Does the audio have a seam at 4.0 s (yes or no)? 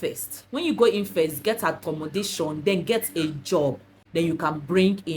yes